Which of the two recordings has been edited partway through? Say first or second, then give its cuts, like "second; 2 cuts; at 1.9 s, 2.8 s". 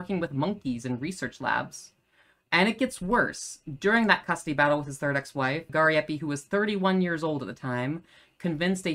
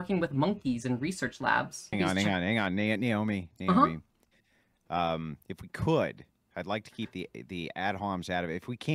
second; 1 cut; at 2.0 s